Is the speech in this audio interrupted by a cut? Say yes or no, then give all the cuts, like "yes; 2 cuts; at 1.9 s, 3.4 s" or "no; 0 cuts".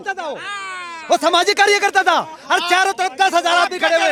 no; 0 cuts